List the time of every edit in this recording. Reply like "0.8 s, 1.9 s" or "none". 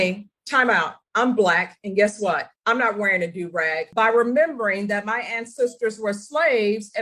3.9 s